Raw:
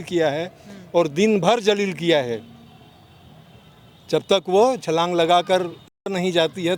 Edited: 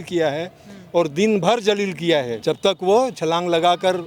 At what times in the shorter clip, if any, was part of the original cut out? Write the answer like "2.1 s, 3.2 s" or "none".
2.3 s